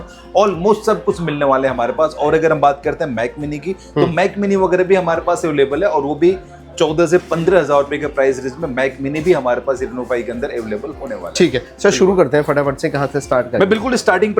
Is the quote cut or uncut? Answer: uncut